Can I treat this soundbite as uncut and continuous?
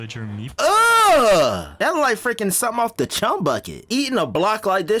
no; 2 cuts; at 1.7 s, 3.7 s

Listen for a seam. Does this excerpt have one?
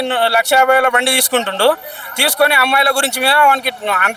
no; 0 cuts

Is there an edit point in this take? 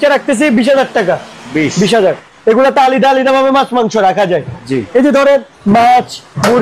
yes; 1 cut; at 2.3 s

